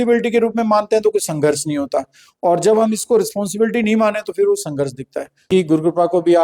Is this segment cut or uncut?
cut